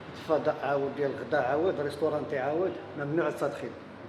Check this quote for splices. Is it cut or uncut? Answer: uncut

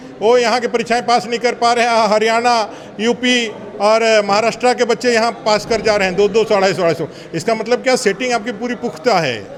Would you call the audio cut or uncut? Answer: uncut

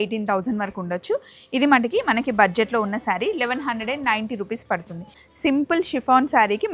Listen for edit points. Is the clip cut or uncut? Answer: cut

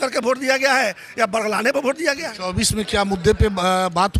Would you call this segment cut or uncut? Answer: uncut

